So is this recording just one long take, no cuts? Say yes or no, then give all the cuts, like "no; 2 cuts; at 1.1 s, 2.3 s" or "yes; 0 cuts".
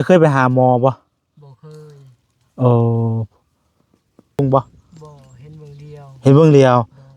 no; 1 cut; at 4.4 s